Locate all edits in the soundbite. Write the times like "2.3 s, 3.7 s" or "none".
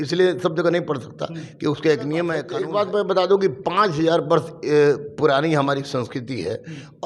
2.5 s